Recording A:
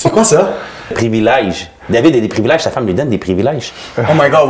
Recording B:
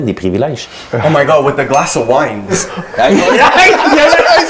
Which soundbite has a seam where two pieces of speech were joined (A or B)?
A